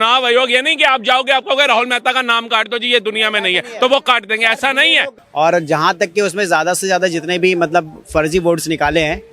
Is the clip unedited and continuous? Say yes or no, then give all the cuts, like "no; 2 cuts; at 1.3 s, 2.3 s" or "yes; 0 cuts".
no; 1 cut; at 5.2 s